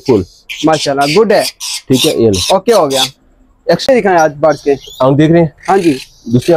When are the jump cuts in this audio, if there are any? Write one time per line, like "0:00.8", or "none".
0:03.8